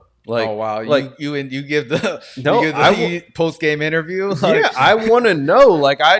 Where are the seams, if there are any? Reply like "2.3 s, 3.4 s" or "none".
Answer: none